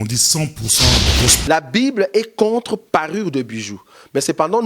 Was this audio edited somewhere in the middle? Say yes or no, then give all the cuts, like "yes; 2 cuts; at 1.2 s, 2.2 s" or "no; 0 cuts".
yes; 1 cut; at 1.4 s